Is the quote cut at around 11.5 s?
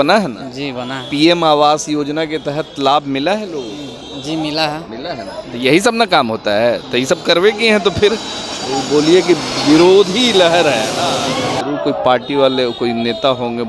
yes; 1 cut; at 11.5 s

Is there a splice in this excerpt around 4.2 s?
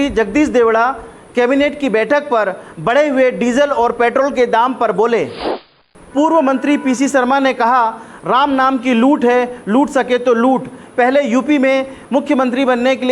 no; 1 cut; at 5.5 s

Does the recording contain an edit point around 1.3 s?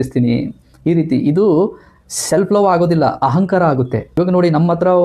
no; 1 cut; at 4.0 s

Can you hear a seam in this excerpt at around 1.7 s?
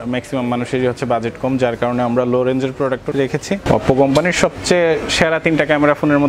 no; 1 cut; at 3.1 s

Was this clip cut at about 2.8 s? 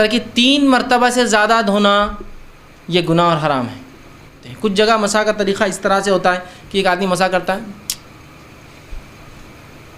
no; 1 cut; at 4.5 s

